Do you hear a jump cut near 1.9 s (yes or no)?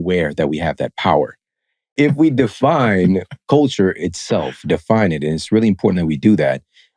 yes